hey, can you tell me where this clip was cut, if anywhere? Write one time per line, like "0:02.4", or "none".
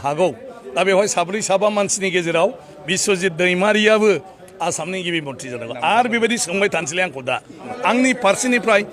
0:07.7